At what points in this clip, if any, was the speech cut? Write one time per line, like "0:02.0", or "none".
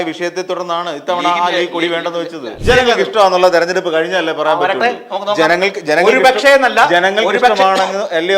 0:02.5